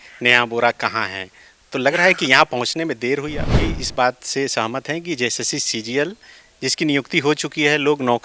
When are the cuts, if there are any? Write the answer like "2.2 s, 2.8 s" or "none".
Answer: 3.5 s